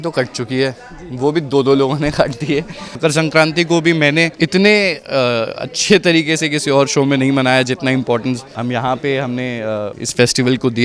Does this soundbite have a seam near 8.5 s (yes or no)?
yes